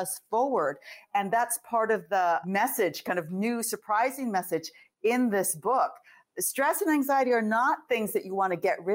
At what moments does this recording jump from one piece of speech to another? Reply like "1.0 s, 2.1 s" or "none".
2.4 s